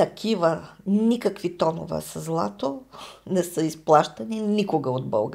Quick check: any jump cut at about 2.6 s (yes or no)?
no